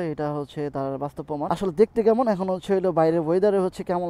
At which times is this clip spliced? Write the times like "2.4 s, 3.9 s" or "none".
1.5 s